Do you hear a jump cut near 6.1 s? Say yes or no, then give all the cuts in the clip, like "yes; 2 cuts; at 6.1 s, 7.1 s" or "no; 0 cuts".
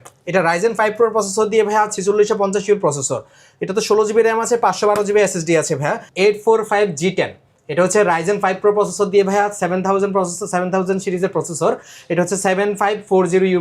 yes; 1 cut; at 6.1 s